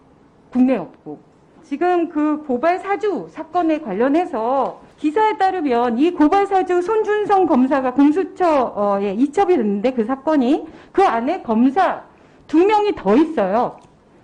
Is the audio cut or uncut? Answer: uncut